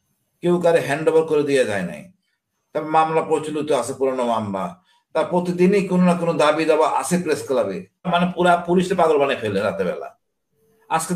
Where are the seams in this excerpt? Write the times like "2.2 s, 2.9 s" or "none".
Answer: 8.1 s